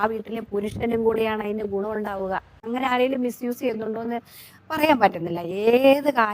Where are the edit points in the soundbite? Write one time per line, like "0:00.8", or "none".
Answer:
0:02.7